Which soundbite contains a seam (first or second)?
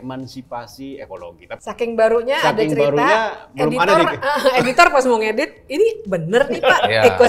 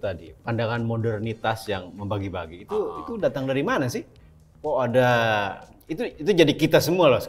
first